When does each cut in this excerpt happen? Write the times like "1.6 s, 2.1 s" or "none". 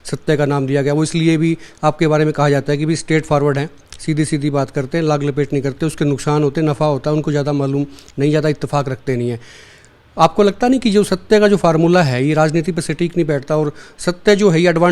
none